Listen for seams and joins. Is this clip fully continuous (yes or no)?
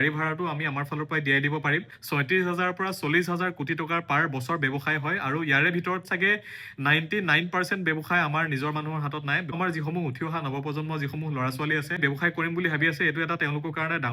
no